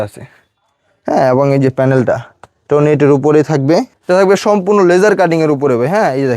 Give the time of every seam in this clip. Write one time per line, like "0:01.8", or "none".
0:04.0